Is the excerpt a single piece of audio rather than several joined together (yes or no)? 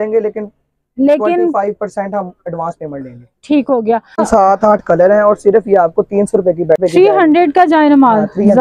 no